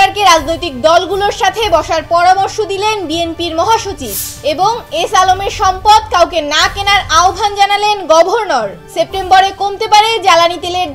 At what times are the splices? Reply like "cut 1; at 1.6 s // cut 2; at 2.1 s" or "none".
cut 1; at 8.8 s